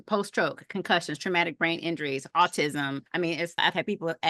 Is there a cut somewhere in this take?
yes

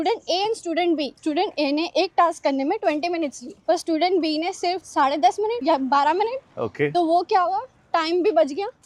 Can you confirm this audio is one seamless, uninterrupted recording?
yes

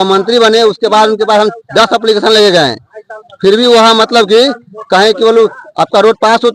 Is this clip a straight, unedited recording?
yes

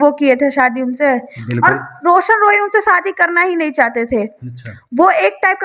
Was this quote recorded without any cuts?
yes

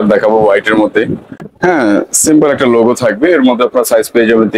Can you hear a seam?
no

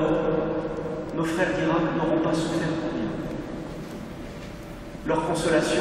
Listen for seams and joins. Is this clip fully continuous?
yes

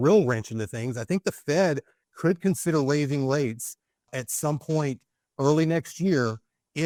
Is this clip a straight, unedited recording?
yes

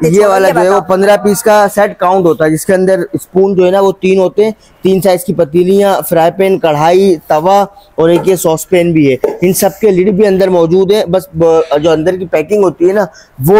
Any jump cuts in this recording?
no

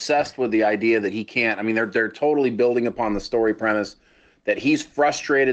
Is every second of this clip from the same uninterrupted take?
yes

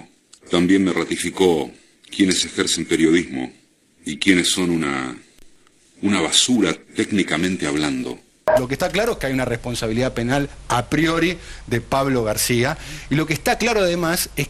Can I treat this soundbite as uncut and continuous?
yes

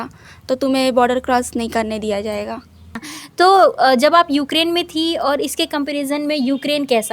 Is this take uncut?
no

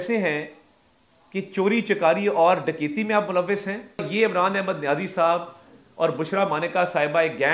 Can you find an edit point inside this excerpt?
yes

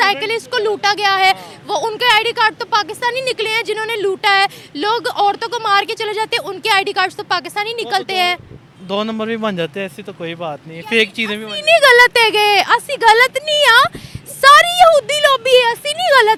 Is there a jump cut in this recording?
no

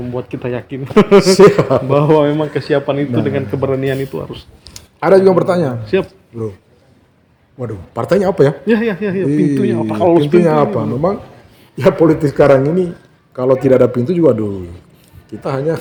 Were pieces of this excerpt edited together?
no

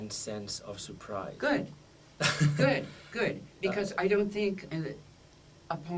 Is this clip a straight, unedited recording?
no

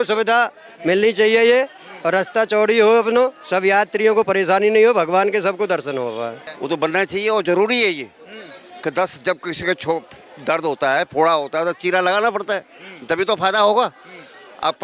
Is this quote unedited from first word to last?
no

